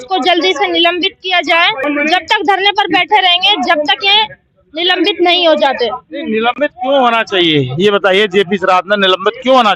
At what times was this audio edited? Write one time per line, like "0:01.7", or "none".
0:01.8

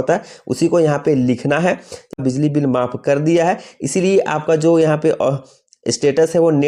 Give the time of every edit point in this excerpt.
0:02.2

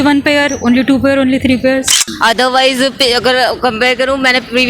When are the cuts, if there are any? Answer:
0:01.9

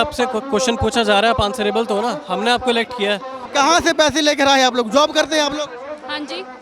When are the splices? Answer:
0:03.4

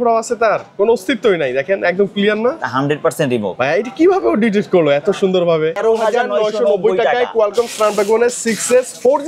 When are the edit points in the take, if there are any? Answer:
0:03.5
0:05.8

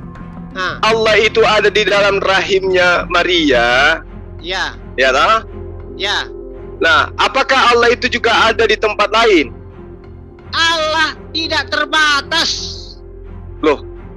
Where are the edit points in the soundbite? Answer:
none

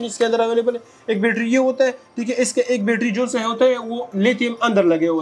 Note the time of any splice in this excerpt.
none

